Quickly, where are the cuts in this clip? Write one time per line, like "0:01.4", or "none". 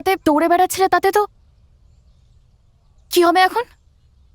none